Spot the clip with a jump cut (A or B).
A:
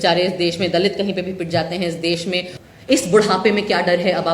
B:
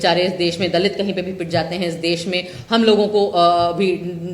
A